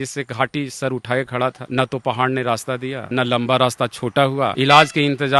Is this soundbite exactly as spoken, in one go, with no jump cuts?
no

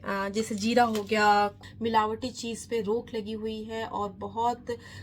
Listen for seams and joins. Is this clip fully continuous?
no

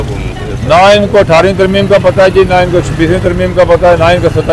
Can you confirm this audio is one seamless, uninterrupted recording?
yes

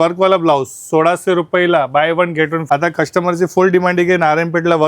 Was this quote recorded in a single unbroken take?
no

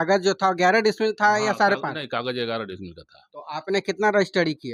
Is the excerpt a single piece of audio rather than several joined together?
yes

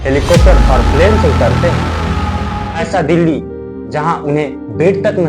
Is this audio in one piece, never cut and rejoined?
no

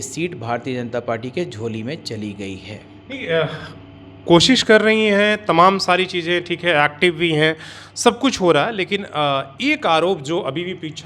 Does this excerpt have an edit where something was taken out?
no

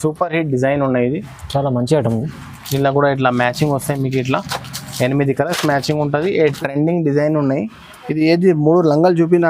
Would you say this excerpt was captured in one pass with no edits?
no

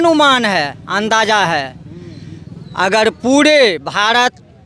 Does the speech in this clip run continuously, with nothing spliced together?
yes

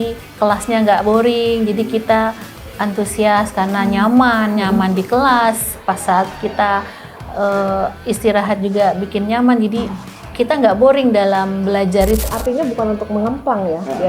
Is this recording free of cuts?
no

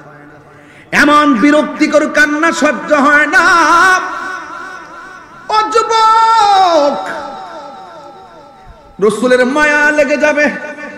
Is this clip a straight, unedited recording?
yes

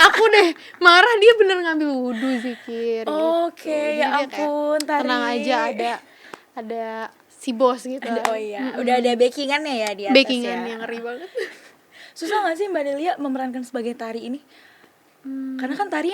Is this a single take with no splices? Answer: yes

